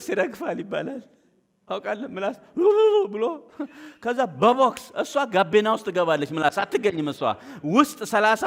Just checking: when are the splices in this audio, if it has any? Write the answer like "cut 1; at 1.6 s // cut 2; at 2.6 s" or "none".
none